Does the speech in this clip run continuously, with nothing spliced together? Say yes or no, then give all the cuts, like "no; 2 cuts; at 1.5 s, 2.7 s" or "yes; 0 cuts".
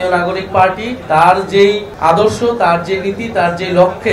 yes; 0 cuts